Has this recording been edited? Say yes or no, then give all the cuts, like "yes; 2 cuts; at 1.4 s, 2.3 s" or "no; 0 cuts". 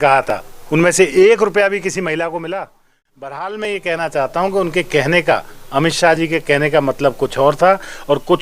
yes; 1 cut; at 2.9 s